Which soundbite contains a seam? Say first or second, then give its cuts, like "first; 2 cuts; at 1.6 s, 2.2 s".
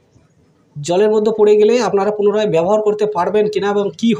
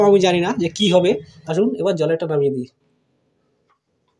second; 1 cut; at 1.4 s